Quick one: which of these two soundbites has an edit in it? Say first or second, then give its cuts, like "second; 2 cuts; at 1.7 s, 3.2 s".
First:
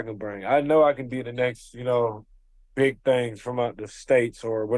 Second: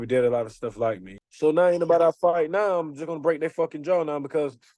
second; 1 cut; at 1.1 s